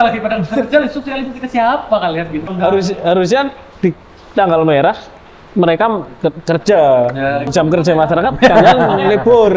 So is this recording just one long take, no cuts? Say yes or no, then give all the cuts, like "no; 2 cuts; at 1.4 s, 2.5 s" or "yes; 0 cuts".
no; 2 cuts; at 2.5 s, 7.4 s